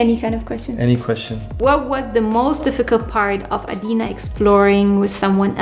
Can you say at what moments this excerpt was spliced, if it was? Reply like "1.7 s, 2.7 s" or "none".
1.5 s